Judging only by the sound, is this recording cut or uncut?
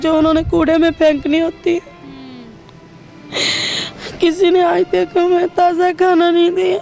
uncut